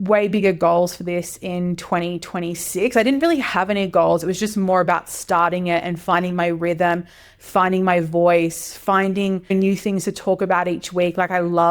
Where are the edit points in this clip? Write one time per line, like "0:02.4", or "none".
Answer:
0:09.5